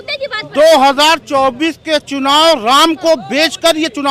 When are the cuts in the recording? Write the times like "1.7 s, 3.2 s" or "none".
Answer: none